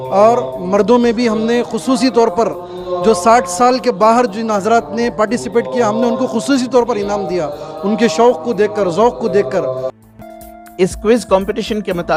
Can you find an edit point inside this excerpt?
no; 0 cuts

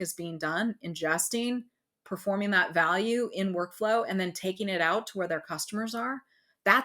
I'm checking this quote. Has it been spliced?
no; 0 cuts

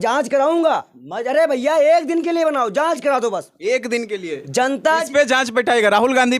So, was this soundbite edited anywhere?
no; 0 cuts

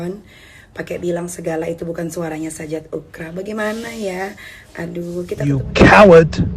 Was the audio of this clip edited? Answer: yes; 1 cut; at 5.4 s

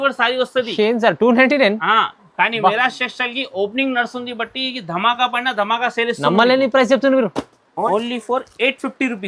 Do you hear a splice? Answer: yes; 1 cut; at 7.9 s

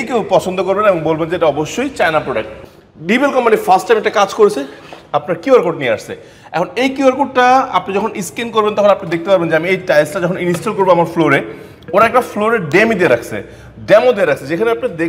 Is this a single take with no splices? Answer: no; 1 cut; at 2.6 s

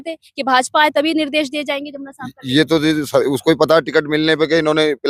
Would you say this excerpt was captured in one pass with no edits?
yes; 0 cuts

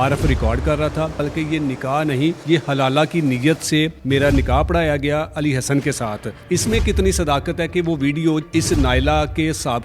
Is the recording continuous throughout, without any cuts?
no; 5 cuts; at 1.2 s, 2.4 s, 4.0 s, 6.3 s, 8.4 s

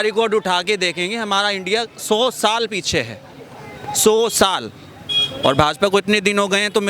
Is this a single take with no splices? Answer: yes; 0 cuts

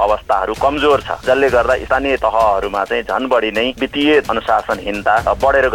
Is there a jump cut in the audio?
yes; 2 cuts; at 2.0 s, 3.8 s

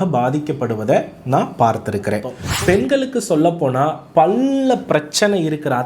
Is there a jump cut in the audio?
yes; 1 cut; at 2.4 s

